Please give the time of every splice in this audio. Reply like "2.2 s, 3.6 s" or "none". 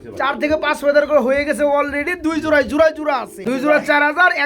3.4 s